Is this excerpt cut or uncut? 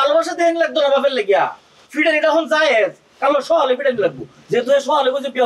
uncut